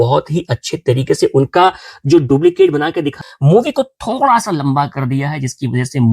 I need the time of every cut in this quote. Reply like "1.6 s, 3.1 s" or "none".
3.2 s